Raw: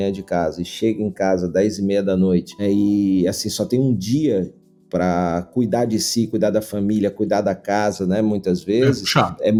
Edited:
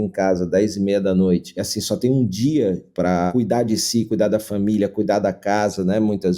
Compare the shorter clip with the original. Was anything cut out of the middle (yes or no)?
yes